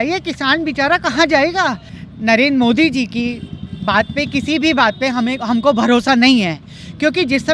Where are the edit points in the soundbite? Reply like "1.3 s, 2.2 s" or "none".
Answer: 1.9 s